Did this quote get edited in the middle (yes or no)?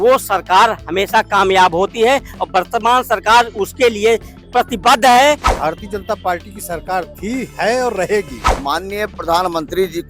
yes